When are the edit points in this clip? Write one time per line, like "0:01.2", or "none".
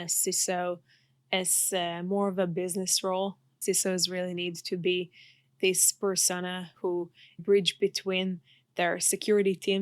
0:03.5
0:07.4